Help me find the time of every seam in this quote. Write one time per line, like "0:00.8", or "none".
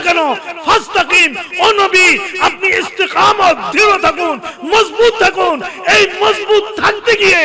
none